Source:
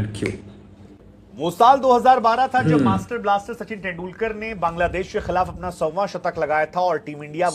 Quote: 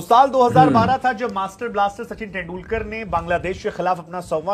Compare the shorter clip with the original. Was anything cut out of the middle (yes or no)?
no